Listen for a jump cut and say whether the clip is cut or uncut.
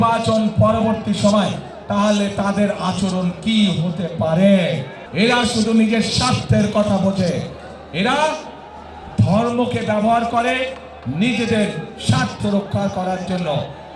uncut